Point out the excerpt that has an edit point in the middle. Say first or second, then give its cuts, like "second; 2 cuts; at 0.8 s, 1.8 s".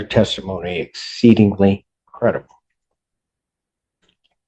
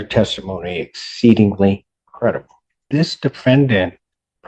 second; 1 cut; at 2.8 s